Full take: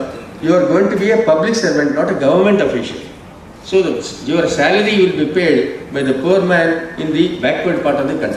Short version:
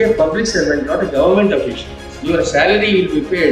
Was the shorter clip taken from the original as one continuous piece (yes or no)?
no